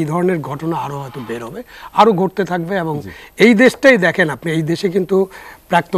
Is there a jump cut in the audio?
no; 0 cuts

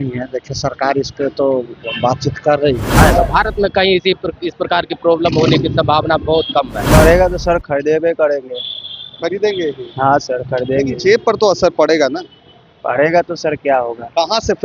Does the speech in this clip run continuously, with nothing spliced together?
no; 2 cuts; at 2.9 s, 6.8 s

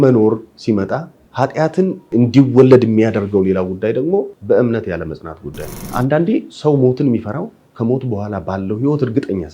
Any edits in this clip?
yes; 4 cuts; at 1.2 s, 2.1 s, 4.3 s, 5.9 s

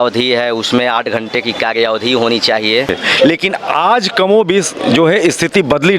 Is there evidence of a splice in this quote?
yes; 1 cut; at 2.9 s

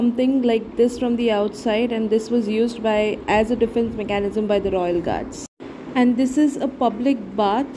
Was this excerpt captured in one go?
yes; 0 cuts

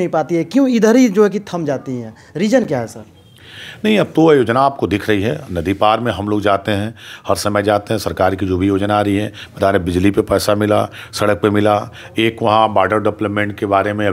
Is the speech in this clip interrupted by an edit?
no; 0 cuts

